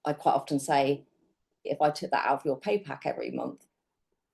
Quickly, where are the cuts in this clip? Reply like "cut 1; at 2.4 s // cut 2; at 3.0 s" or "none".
cut 1; at 1.7 s